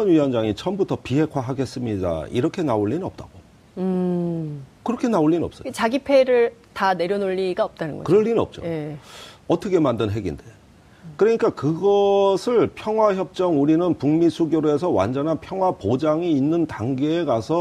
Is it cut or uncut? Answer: cut